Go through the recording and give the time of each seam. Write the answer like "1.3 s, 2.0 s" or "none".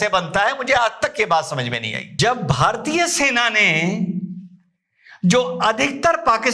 2.0 s